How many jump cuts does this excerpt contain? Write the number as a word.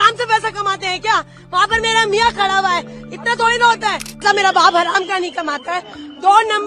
one